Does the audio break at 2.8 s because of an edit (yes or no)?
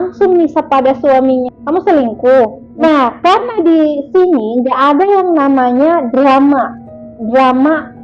yes